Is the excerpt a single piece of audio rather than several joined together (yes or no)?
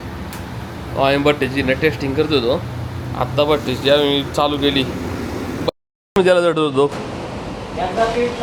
yes